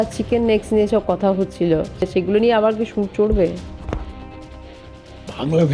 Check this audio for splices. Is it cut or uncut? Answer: cut